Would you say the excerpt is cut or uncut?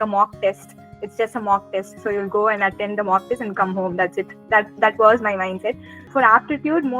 cut